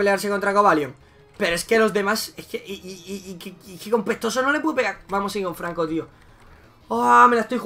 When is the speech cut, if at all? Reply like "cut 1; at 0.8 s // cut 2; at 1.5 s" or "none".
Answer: none